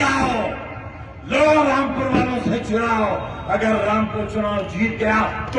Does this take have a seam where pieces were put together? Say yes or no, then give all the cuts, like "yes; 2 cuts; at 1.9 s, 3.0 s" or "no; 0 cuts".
no; 0 cuts